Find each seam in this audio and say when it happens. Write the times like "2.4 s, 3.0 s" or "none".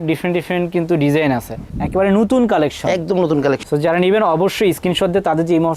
3.6 s